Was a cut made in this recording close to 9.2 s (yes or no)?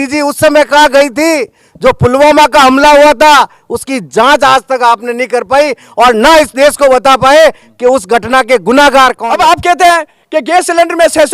yes